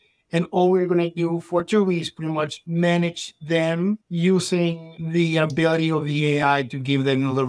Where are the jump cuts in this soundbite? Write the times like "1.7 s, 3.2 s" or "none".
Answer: 2.6 s, 4.1 s, 4.9 s